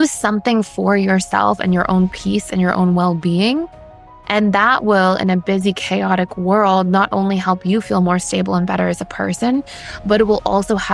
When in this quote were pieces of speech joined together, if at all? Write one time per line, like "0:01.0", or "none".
none